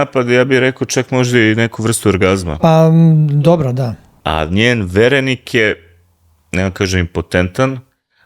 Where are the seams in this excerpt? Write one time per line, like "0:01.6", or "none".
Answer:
0:04.2